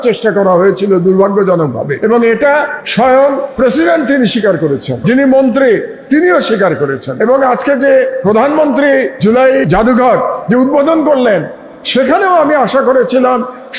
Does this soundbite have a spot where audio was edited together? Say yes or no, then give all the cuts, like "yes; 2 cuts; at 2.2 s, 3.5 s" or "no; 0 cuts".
yes; 7 cuts; at 1.9 s, 2.8 s, 3.5 s, 5.0 s, 7.0 s, 8.2 s, 9.3 s